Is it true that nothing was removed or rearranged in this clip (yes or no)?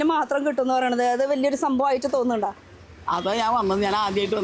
yes